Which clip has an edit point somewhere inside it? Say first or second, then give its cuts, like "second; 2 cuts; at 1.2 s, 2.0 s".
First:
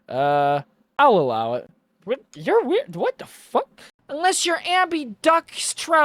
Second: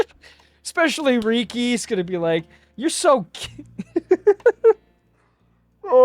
first; 1 cut; at 3.9 s